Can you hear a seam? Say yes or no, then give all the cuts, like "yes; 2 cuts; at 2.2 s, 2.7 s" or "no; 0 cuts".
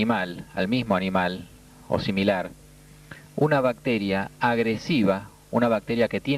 no; 0 cuts